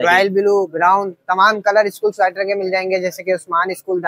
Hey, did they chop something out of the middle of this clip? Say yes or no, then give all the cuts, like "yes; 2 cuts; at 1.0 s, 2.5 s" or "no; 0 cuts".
no; 0 cuts